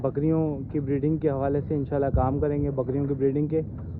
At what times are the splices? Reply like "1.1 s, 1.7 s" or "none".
none